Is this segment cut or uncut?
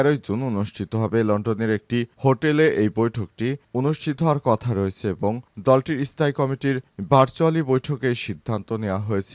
uncut